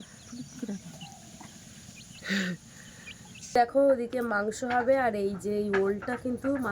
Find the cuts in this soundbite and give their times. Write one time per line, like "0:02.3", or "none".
0:03.3